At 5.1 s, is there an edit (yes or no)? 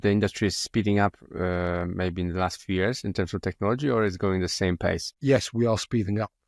yes